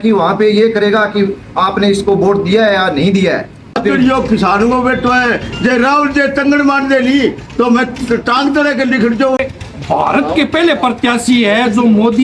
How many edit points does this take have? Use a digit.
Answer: 2